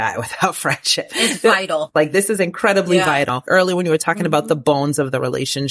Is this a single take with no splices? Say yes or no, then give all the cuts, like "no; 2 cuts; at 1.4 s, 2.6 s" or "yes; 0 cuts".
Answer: no; 2 cuts; at 1.9 s, 3.4 s